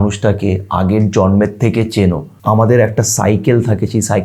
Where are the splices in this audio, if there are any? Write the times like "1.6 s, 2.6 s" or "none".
2.3 s